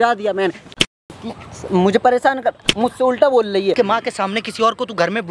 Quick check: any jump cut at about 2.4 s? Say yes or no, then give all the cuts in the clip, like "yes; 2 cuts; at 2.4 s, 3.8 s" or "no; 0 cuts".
no; 1 cut; at 3.7 s